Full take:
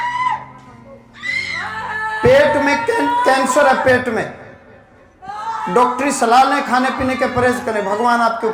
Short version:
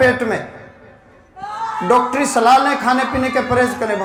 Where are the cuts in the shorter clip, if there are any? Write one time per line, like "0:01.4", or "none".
none